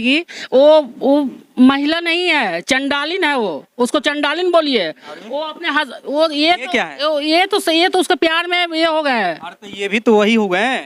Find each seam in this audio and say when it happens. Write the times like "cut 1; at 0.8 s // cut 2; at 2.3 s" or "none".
none